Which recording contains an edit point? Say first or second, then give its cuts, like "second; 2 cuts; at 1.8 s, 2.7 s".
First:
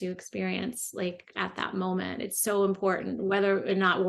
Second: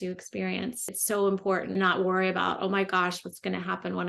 second; 2 cuts; at 0.9 s, 1.8 s